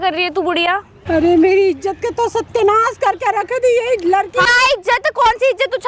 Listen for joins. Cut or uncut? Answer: cut